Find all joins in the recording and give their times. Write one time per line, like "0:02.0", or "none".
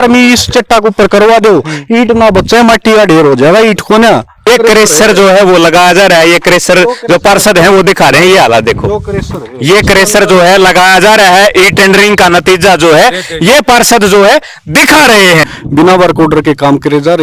0:04.5
0:15.5